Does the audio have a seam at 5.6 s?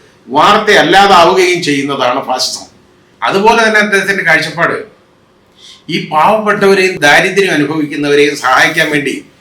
no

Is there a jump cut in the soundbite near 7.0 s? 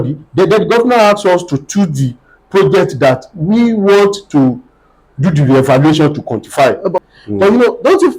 yes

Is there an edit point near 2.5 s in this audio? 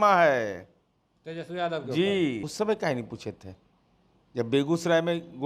yes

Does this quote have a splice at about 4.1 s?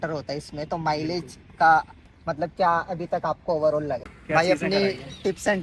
yes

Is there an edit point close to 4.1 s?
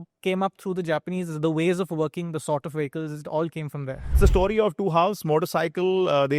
yes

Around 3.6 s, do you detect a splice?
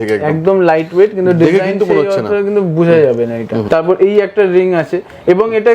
yes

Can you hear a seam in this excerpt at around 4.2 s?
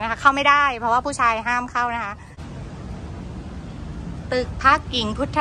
no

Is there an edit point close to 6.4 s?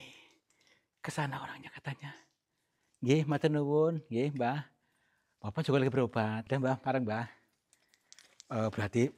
yes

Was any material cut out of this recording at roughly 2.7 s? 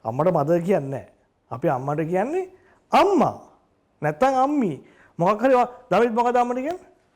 no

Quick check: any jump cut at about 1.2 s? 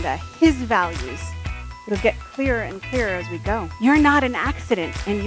no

